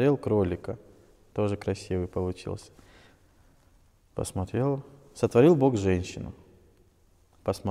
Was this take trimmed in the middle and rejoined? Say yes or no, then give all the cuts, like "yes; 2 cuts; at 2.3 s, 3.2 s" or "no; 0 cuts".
no; 0 cuts